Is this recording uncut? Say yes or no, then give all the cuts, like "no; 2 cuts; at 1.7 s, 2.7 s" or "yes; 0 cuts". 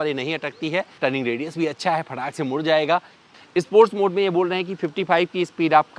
no; 2 cuts; at 0.9 s, 3.3 s